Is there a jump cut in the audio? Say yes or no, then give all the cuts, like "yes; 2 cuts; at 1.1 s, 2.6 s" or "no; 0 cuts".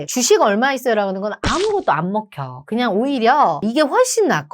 yes; 1 cut; at 3.6 s